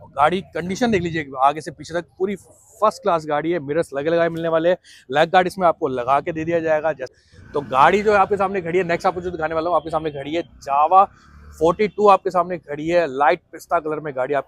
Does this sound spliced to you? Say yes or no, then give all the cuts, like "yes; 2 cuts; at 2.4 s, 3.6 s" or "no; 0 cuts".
yes; 1 cut; at 7.5 s